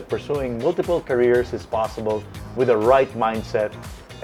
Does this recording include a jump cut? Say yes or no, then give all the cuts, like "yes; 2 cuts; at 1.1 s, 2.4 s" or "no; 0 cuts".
no; 0 cuts